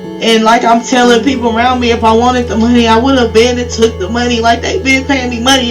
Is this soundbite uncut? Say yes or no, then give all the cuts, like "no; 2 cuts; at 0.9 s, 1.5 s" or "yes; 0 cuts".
yes; 0 cuts